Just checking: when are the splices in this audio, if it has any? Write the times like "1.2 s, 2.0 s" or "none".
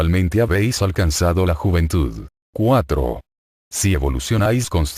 1.6 s